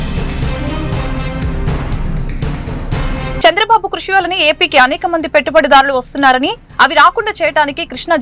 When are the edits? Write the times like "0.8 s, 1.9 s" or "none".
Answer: 3.4 s